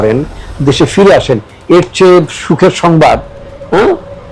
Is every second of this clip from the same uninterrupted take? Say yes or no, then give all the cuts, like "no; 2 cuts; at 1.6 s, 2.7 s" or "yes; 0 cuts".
yes; 0 cuts